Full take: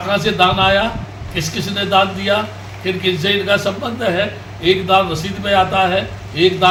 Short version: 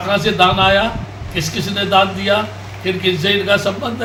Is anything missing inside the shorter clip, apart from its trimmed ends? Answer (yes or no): no